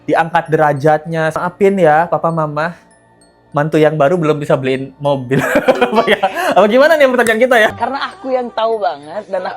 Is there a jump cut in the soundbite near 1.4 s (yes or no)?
yes